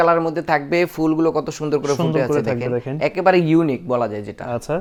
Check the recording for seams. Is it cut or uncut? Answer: uncut